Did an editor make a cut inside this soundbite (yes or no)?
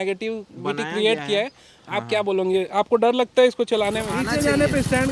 yes